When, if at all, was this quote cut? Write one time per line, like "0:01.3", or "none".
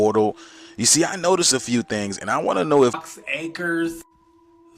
0:03.0